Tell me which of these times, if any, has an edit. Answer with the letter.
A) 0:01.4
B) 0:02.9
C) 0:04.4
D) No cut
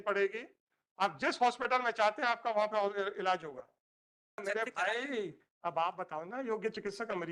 C